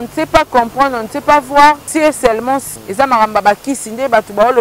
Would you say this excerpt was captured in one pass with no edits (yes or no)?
no